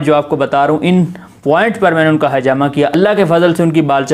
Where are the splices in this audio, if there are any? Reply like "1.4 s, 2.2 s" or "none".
2.9 s